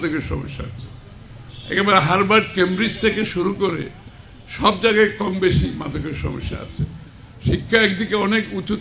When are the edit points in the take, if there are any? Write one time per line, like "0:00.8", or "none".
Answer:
none